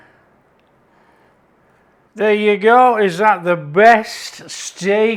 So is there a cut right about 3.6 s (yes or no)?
no